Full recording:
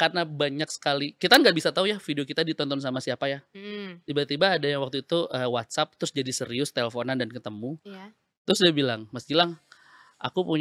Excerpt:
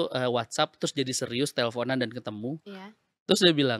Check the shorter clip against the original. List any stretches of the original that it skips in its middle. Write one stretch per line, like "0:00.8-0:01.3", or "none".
none